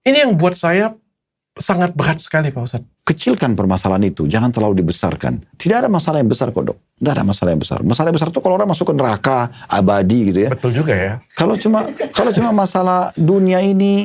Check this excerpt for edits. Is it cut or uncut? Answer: cut